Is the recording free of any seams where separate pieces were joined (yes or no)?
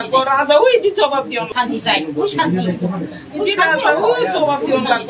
no